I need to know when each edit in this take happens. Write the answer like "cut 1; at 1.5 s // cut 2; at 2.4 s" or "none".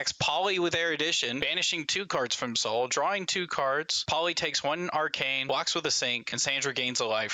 cut 1; at 1.5 s // cut 2; at 3.9 s // cut 3; at 5.4 s // cut 4; at 6.3 s